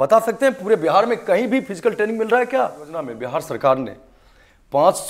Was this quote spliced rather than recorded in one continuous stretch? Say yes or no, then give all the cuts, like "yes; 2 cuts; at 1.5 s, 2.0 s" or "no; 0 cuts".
yes; 1 cut; at 3.2 s